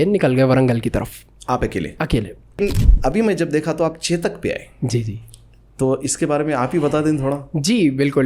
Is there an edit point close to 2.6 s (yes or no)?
yes